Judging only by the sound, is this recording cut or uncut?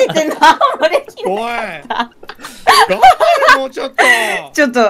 uncut